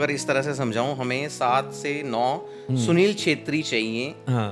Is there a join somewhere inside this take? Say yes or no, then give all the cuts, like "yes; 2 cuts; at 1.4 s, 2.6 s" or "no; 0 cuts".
no; 0 cuts